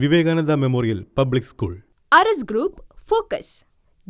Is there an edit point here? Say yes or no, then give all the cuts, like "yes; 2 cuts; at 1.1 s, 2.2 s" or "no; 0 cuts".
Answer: yes; 1 cut; at 1.7 s